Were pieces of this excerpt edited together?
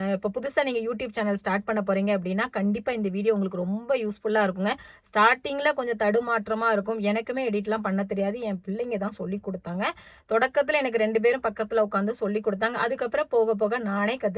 no; 0 cuts

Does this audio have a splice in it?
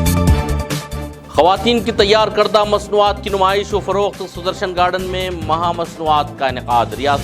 yes; 1 cut; at 1.0 s

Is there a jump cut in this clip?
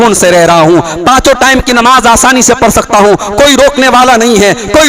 no; 0 cuts

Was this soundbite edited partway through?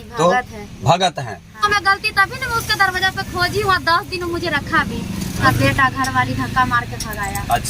yes; 2 cuts; at 1.6 s, 5.4 s

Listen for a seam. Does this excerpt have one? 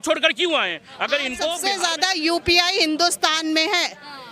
yes; 1 cut; at 1.5 s

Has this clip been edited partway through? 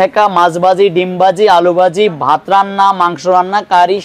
no; 0 cuts

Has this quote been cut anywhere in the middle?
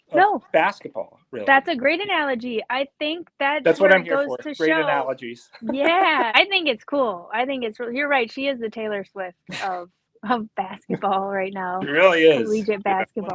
yes; 1 cut; at 6.3 s

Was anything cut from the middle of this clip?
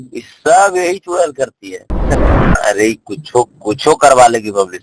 yes; 1 cut; at 2.2 s

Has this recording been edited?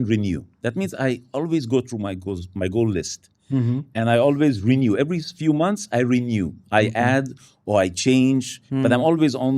no; 0 cuts

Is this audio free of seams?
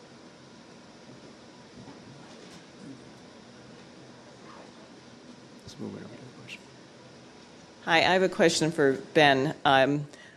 yes; 0 cuts

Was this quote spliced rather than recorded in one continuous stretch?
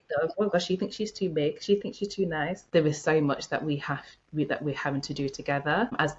yes; 1 cut; at 2.6 s

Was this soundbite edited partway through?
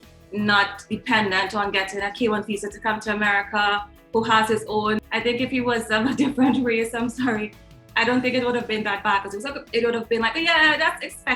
yes; 1 cut; at 5.0 s

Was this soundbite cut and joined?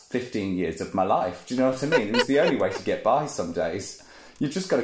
no; 0 cuts

